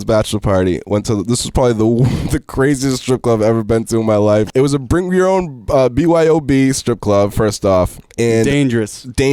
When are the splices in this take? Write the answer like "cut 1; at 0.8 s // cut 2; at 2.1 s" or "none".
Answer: cut 1; at 4.5 s // cut 2; at 8.0 s